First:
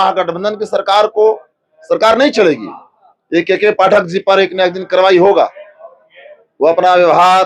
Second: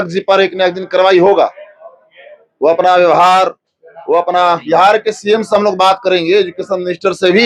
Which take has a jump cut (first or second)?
second